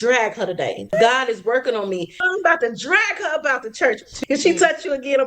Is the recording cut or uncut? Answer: cut